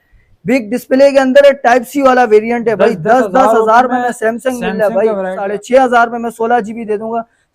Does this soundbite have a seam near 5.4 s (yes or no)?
yes